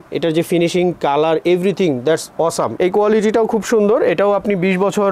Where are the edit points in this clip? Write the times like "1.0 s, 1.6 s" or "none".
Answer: 2.7 s

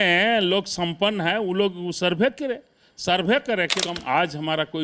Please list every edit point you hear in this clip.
3.8 s

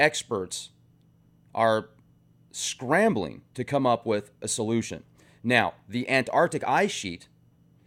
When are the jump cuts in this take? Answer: 3.7 s

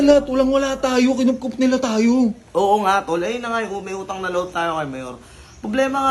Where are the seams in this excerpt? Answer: none

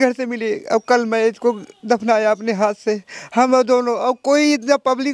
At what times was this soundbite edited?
none

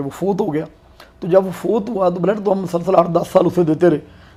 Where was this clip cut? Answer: none

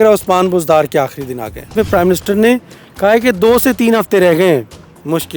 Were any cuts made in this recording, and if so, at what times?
1.7 s

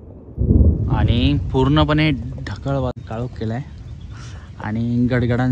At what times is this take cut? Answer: 3.0 s

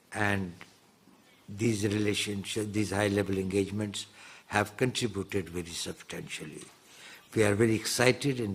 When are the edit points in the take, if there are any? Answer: none

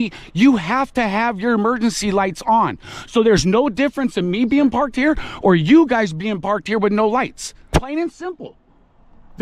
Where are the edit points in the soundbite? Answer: 7.7 s

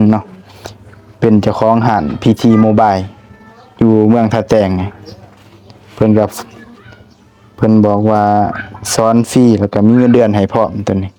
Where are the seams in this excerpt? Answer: none

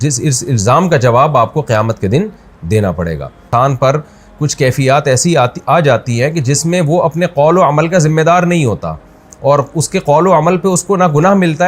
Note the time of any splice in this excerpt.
3.4 s

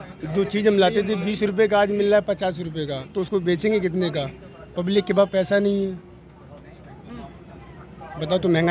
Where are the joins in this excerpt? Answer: none

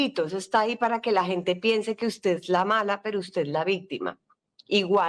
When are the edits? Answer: none

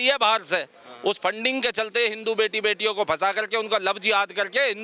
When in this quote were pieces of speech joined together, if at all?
none

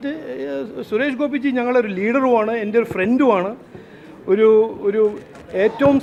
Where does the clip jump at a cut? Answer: none

